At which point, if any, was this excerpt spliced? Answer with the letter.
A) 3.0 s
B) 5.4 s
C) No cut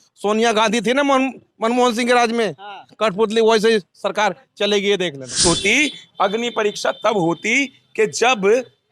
B